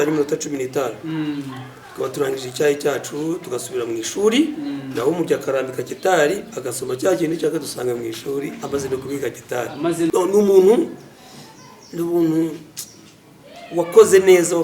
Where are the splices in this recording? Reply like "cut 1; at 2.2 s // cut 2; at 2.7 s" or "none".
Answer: cut 1; at 10.1 s